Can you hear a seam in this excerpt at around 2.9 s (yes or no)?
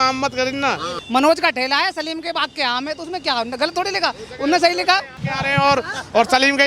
no